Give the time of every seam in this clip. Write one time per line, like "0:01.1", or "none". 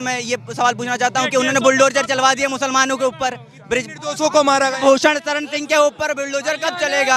none